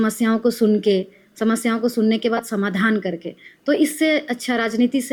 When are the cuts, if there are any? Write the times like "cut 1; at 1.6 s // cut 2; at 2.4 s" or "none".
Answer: none